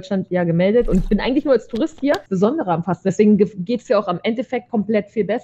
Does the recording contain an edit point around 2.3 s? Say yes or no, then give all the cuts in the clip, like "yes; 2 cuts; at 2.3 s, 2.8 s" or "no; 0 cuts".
yes; 1 cut; at 2.3 s